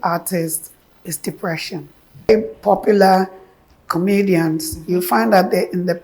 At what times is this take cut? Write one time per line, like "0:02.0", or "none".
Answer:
0:02.3